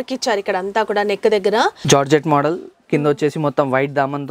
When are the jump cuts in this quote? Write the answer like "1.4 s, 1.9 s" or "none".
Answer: 1.8 s